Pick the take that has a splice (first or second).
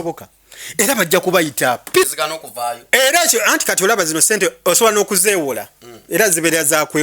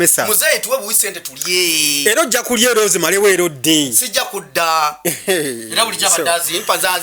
first